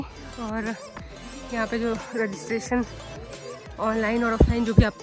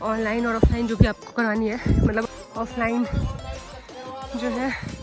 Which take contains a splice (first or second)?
second